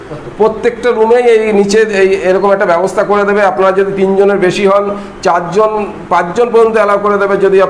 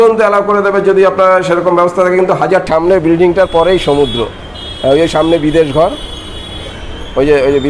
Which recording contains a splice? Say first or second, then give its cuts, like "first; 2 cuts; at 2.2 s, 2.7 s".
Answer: second; 1 cut; at 2.7 s